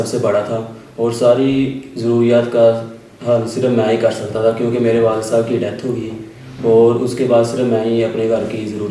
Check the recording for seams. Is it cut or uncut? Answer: uncut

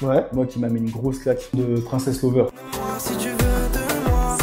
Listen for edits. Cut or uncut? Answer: cut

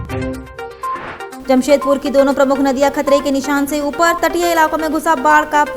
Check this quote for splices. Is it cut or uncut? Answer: cut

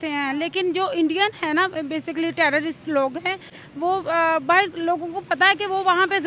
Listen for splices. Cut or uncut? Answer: uncut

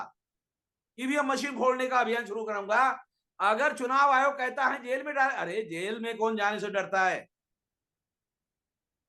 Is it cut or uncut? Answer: uncut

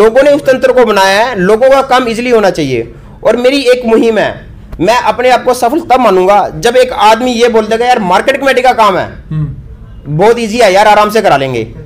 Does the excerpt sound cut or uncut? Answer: uncut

